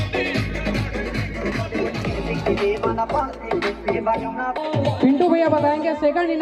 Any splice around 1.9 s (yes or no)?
no